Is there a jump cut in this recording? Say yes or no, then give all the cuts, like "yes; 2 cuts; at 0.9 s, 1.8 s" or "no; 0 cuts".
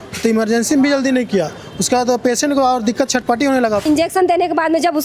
yes; 1 cut; at 3.8 s